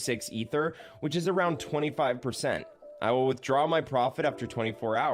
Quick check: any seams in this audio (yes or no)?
no